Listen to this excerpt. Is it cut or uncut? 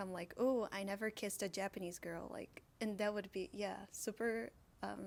uncut